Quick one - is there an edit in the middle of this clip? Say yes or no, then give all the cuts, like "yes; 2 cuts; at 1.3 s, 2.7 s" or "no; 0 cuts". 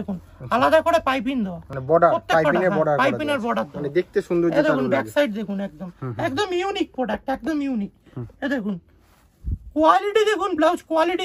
no; 0 cuts